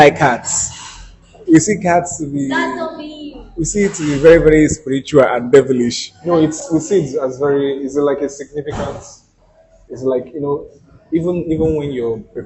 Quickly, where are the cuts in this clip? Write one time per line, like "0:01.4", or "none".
none